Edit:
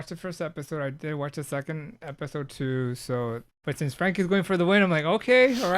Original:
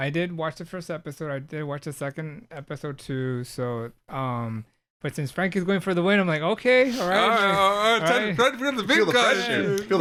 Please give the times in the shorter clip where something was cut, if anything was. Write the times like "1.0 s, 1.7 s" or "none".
3.5 s

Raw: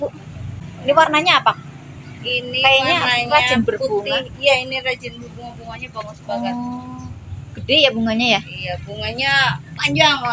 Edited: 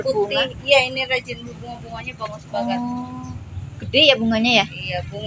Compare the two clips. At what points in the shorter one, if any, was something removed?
none

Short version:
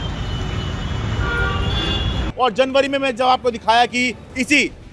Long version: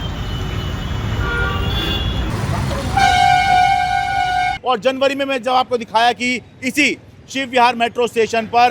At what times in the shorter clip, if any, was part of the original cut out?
2.3 s

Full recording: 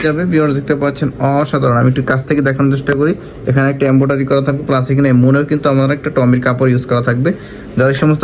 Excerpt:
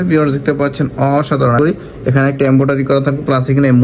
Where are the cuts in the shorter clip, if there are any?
1.6 s

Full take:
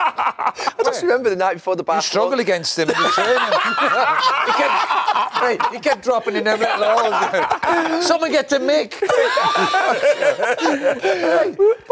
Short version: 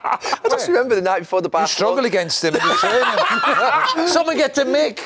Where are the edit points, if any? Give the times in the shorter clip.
3.9 s

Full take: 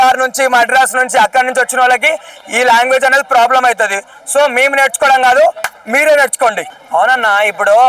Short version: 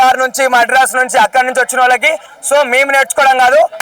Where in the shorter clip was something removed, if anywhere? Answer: 2.3 s

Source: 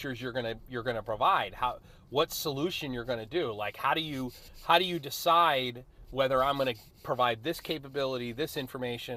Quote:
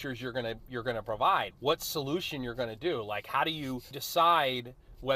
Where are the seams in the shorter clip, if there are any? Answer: 1.5 s, 4.0 s

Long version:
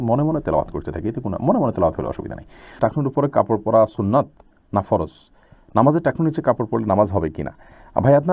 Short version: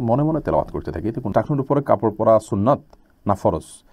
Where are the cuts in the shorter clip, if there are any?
1.2 s

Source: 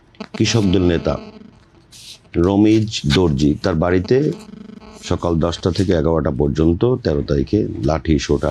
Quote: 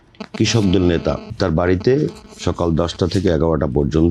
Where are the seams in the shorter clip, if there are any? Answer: 1.3 s, 2.3 s

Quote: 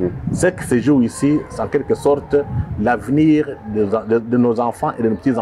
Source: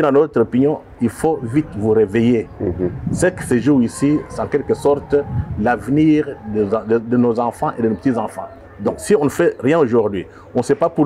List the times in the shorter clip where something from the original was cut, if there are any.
none

